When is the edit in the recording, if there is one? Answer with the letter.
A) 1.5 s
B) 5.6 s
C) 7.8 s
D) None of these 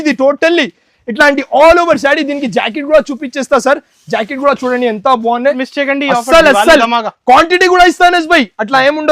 B